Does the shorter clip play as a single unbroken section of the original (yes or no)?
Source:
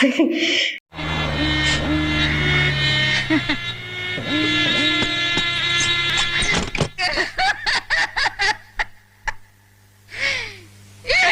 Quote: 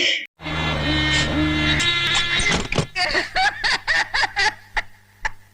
no